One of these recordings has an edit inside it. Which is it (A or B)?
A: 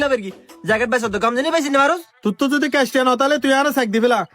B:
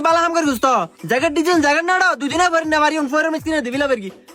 A